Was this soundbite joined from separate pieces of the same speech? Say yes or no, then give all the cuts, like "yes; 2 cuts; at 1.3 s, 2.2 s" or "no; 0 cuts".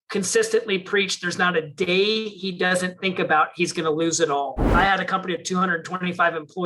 yes; 1 cut; at 4.7 s